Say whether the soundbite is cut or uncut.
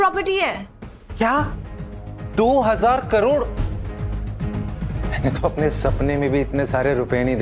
cut